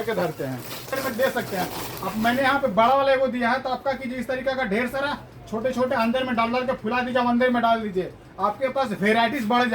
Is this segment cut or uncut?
cut